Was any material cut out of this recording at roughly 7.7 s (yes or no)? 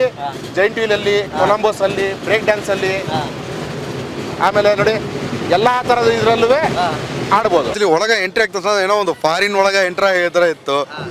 yes